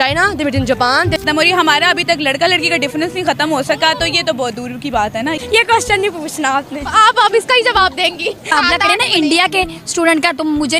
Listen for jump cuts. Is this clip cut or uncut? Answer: cut